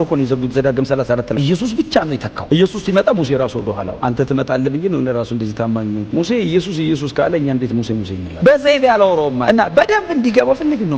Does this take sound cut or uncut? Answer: cut